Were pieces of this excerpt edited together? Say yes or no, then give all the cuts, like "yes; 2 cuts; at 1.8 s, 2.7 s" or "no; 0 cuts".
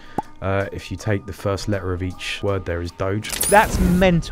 yes; 2 cuts; at 2.4 s, 3.3 s